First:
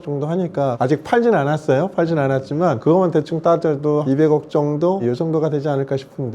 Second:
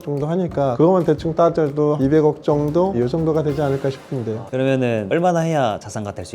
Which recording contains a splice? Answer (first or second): second